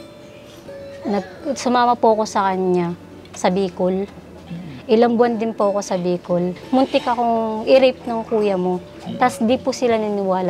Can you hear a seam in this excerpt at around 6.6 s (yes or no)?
yes